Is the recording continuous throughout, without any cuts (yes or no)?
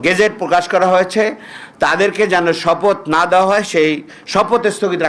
yes